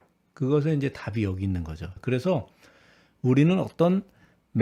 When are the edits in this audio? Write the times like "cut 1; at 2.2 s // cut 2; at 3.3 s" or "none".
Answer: cut 1; at 1.9 s